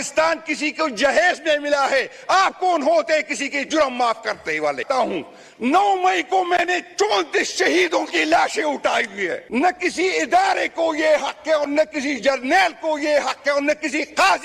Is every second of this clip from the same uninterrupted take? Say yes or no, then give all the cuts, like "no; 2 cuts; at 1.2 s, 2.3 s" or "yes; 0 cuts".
no; 2 cuts; at 4.8 s, 9.3 s